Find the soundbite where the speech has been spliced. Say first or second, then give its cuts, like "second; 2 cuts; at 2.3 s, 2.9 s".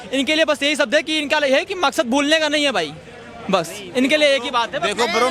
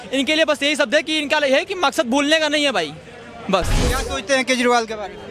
second; 1 cut; at 3.8 s